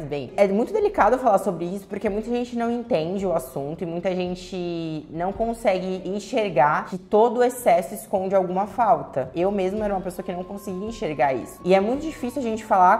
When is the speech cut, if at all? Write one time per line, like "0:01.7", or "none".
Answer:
none